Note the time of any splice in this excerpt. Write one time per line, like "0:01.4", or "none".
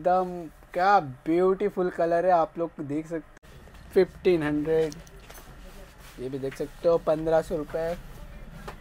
0:03.2